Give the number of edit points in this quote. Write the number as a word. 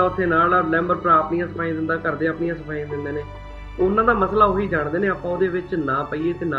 zero